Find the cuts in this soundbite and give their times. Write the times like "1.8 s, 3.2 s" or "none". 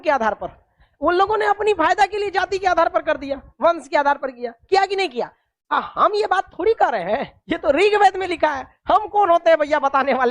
none